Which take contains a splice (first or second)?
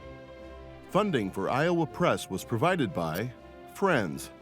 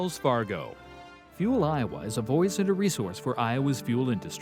first